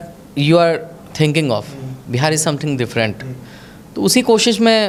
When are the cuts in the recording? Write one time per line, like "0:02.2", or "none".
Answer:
none